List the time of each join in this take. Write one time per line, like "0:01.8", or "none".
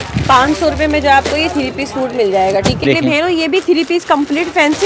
0:02.8